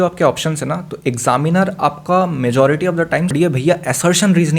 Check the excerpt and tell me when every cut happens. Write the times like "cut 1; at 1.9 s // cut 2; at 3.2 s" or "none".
cut 1; at 3.3 s